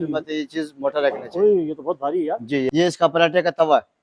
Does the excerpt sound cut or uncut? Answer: cut